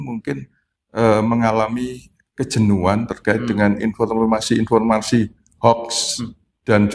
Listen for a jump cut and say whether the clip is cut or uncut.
uncut